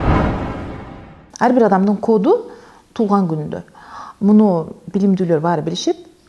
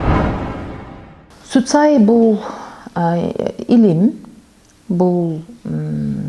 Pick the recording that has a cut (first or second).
first